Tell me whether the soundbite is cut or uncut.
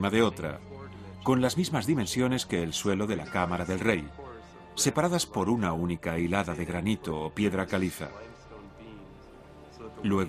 uncut